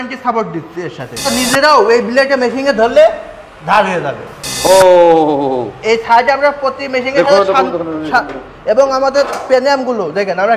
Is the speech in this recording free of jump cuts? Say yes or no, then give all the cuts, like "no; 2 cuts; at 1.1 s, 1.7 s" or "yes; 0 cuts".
no; 1 cut; at 1.3 s